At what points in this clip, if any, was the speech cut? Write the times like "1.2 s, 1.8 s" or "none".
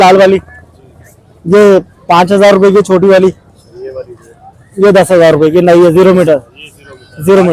none